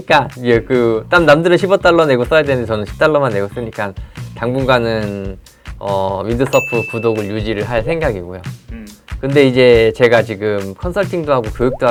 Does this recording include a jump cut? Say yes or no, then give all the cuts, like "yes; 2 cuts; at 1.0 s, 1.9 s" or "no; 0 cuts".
no; 0 cuts